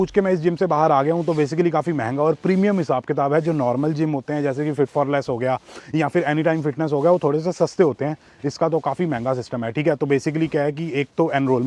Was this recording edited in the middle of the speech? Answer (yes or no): no